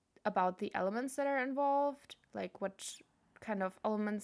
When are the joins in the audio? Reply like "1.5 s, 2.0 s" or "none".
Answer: none